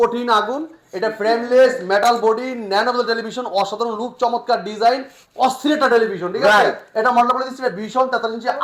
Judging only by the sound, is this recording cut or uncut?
uncut